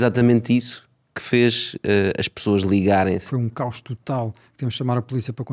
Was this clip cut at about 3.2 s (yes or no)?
yes